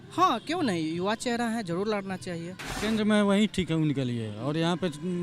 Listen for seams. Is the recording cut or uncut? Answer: cut